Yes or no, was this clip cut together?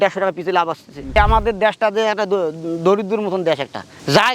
yes